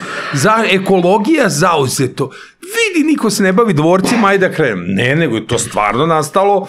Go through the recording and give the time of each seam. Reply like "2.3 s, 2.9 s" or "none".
none